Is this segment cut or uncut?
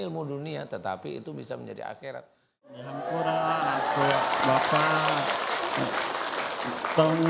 cut